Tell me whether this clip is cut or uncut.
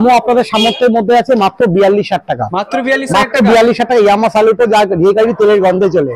uncut